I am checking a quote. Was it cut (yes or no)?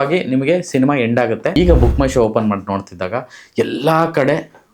yes